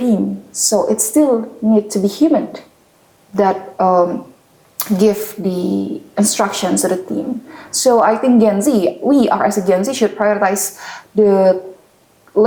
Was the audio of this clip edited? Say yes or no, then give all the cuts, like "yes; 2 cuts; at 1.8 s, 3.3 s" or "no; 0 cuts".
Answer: no; 0 cuts